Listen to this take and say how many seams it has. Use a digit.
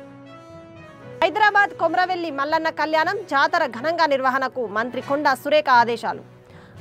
1